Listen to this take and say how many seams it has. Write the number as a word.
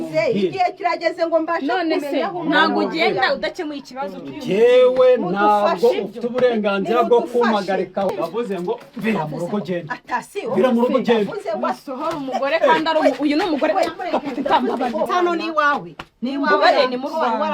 two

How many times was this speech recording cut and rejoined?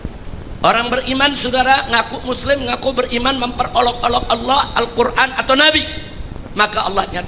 zero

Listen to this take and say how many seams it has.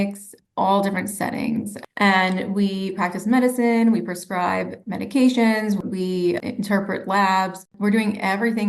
one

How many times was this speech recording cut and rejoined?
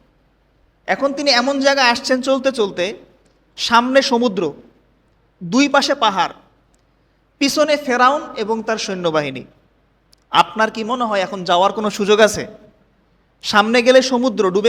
zero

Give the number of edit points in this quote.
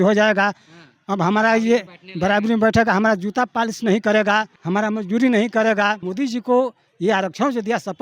two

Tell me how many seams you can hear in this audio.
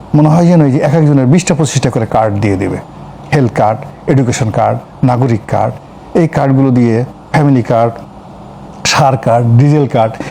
zero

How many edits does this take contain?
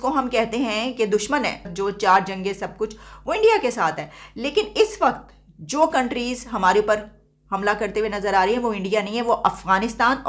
one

